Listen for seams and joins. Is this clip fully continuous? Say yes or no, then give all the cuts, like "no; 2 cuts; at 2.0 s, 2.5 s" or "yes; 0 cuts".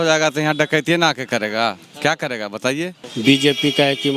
no; 1 cut; at 3.0 s